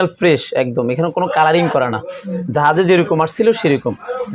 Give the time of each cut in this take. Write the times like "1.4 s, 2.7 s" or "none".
none